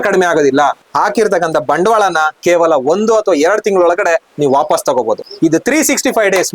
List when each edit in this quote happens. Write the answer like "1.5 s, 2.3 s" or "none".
0.9 s, 5.3 s